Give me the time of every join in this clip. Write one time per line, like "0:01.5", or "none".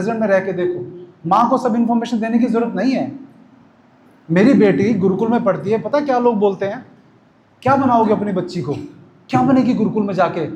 none